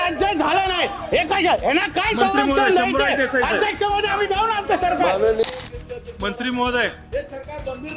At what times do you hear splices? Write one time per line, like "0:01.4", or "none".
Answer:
0:05.4

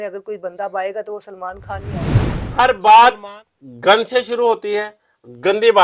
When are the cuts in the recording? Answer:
0:02.1

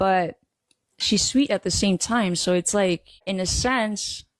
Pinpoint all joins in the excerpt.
0:03.2

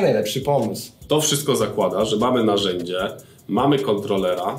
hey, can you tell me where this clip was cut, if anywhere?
0:01.0

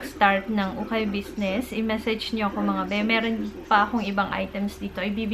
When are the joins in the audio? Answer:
none

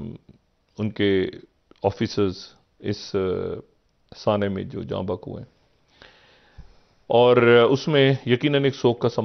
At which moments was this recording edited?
none

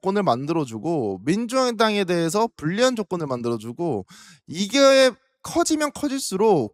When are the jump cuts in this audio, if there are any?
none

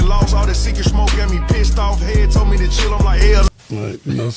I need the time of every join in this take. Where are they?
0:03.5

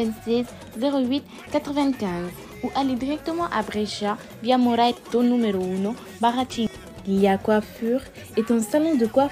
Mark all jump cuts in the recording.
0:06.9

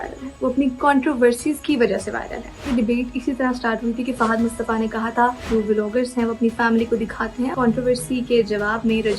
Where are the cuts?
0:02.7
0:05.4
0:07.5

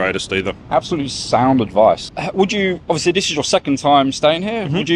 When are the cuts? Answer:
0:02.1

